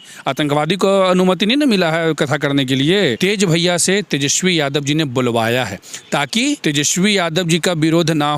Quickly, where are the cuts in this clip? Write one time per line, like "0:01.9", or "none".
0:03.2
0:06.6